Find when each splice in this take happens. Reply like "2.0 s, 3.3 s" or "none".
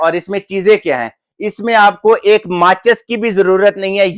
none

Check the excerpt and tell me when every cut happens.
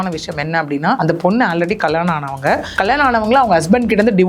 1.0 s, 2.7 s

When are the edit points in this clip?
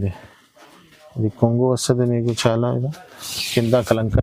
none

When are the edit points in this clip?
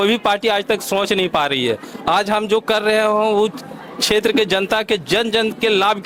none

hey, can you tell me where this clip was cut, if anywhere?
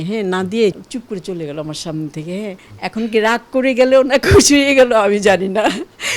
0.8 s, 2.7 s

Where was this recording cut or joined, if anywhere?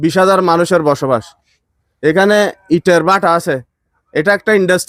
none

